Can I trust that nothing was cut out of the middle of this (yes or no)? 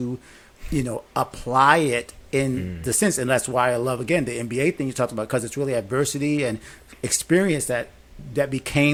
yes